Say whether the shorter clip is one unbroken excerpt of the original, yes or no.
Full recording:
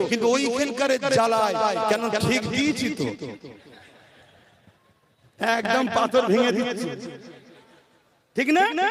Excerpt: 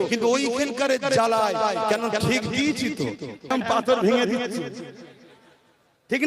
no